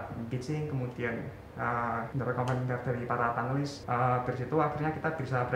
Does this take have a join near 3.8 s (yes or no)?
yes